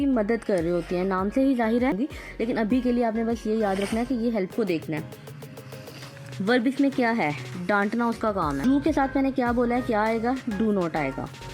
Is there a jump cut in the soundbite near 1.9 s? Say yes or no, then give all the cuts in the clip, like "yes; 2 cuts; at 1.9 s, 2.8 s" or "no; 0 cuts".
yes; 3 cuts; at 1.9 s, 4.5 s, 8.6 s